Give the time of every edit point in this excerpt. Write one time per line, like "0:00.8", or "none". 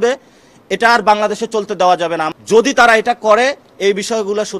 0:02.3